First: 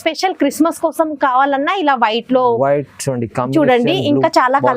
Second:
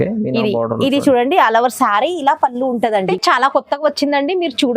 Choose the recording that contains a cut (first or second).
second